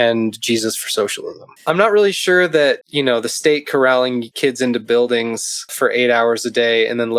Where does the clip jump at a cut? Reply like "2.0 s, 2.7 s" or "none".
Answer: 1.5 s, 2.9 s, 4.3 s, 5.7 s